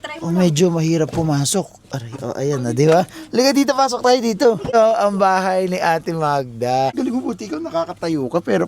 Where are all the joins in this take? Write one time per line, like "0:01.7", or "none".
0:04.7
0:07.0